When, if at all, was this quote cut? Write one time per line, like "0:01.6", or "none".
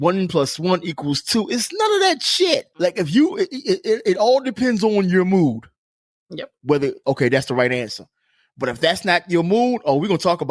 0:02.7